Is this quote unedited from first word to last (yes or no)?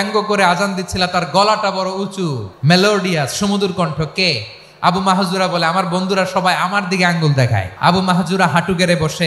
no